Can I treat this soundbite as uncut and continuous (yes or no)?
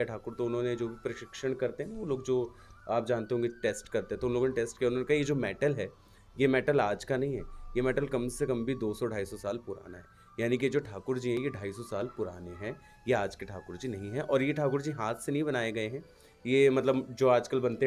yes